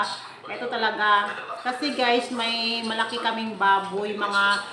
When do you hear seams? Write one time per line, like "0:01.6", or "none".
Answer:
none

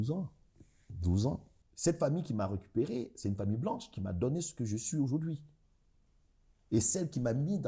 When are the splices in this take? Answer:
0:01.5

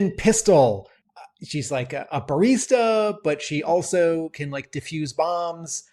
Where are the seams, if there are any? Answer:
0:01.0

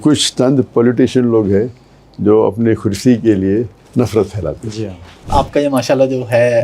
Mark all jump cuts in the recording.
0:05.3

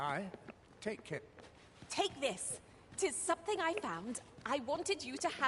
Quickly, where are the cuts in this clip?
0:01.9

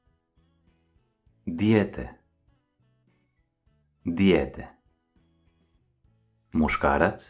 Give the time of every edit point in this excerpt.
0:01.2
0:04.8
0:06.2

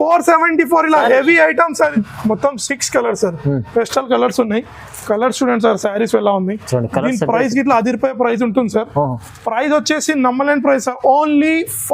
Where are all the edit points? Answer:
0:01.9

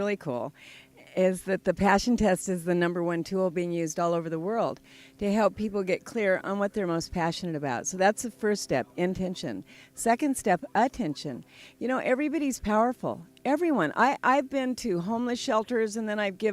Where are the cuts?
0:02.8

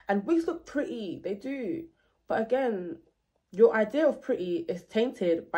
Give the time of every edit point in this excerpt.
none

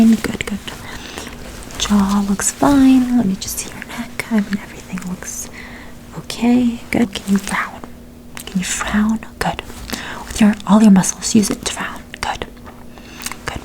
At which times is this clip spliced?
0:07.2

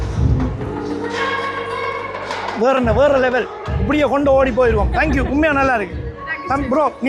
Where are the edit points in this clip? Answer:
none

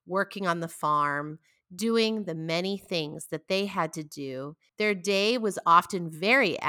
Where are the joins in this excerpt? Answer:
0:04.6

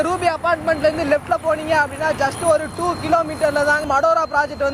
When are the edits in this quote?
0:03.8

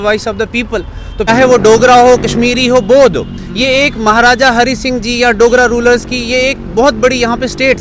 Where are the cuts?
0:01.3

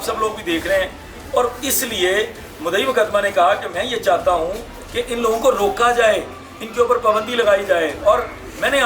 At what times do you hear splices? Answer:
none

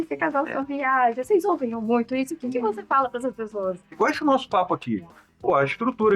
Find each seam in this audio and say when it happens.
0:04.0

